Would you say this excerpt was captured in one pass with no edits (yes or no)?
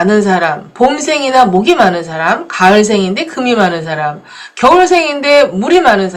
yes